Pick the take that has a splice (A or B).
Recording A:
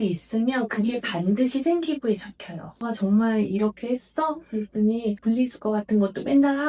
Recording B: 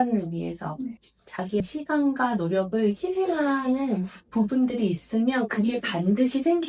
A